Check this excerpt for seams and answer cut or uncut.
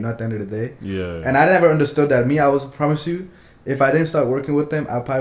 uncut